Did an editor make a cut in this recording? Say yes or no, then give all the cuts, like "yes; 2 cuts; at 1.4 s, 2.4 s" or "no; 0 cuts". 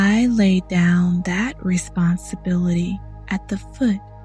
no; 0 cuts